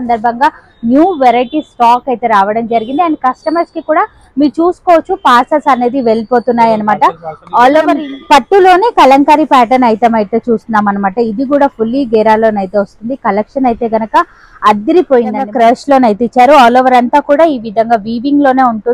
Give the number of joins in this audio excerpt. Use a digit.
2